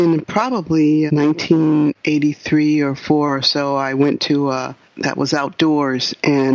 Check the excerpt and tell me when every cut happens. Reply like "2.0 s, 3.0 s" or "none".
1.1 s, 4.8 s